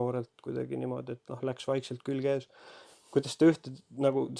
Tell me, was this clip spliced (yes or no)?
no